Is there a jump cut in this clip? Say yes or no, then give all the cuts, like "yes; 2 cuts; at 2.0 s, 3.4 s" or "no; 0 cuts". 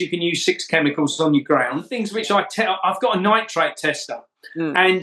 yes; 1 cut; at 2.0 s